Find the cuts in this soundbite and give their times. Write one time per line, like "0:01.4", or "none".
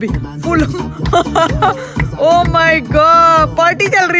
none